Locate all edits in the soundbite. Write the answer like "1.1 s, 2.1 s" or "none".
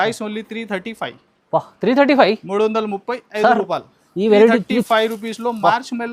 none